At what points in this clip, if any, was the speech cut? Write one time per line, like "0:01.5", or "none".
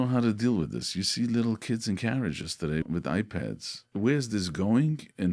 0:02.8
0:03.8